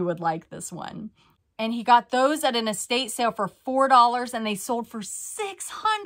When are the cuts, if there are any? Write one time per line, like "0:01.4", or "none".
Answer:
0:01.3